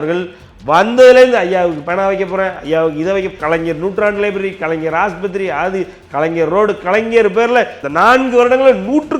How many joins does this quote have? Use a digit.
2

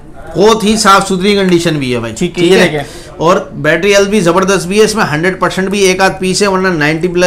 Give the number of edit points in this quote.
0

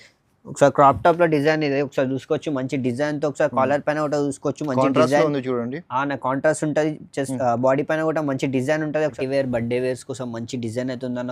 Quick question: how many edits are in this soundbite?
1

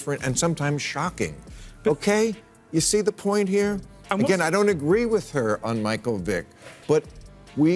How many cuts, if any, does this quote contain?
1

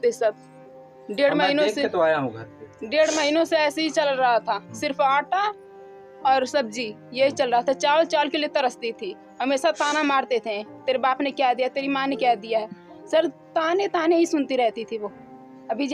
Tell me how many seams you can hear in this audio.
0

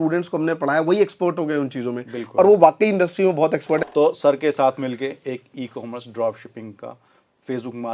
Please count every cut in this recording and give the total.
1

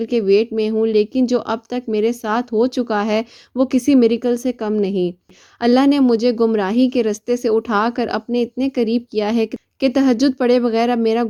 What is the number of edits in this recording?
0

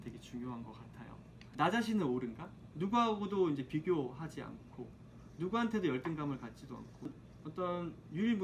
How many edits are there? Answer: 2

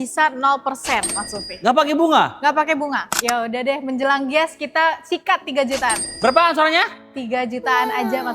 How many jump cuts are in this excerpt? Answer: 1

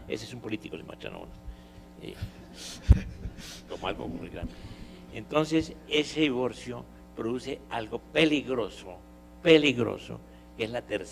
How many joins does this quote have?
1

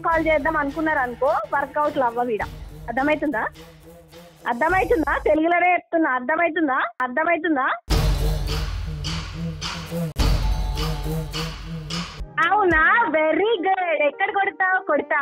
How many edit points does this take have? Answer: 1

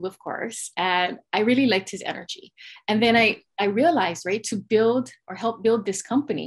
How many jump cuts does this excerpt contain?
0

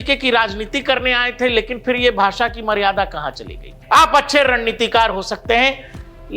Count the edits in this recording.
1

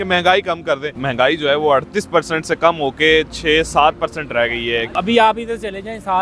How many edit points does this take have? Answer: 2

